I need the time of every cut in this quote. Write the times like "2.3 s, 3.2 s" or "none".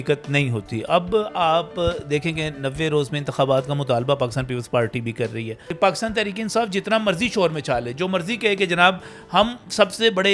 5.6 s